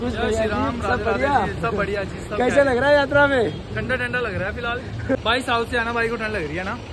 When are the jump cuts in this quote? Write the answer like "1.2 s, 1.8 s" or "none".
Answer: 5.2 s